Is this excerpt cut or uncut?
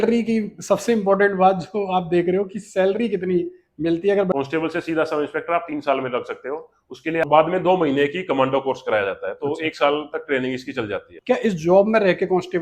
cut